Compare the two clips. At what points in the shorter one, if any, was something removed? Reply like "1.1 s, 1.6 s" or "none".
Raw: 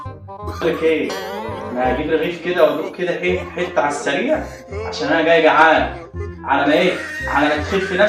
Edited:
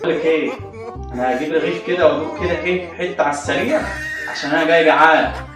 none